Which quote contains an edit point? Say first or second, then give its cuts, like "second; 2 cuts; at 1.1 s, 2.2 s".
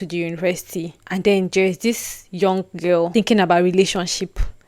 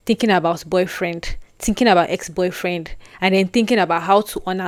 first; 2 cuts; at 1.0 s, 3.1 s